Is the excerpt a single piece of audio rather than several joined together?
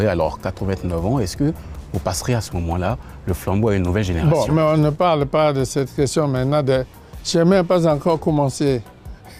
yes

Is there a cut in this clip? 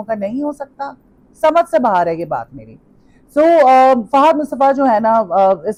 no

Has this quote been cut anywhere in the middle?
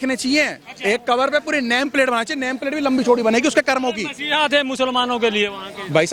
no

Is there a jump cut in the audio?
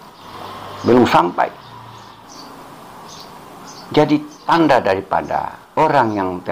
yes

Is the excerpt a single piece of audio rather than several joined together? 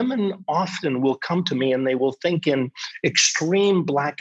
yes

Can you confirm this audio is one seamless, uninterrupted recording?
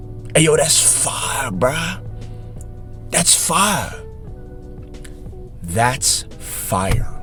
yes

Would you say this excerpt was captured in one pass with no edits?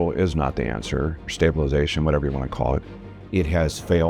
no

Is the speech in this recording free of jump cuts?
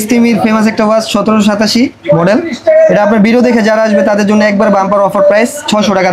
yes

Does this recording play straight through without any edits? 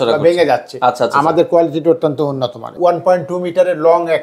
no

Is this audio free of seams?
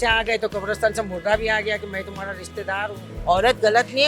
no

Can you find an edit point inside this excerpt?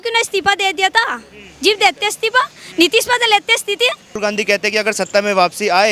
yes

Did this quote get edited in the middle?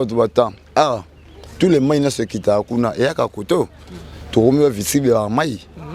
no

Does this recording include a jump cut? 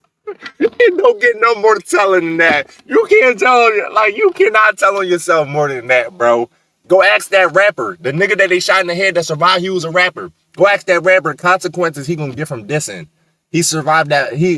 no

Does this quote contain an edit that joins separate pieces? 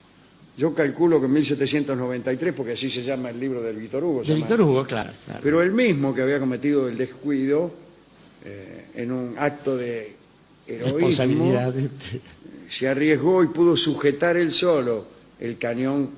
no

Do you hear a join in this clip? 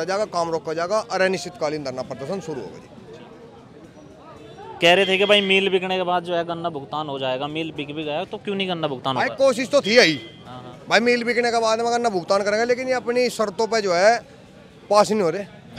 no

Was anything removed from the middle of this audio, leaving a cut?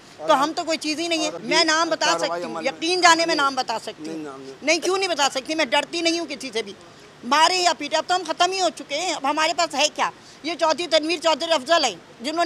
yes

